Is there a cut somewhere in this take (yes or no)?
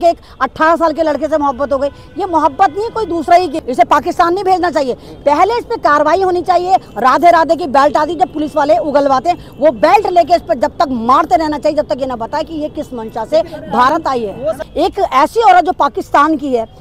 yes